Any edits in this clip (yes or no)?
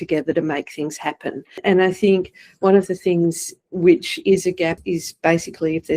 yes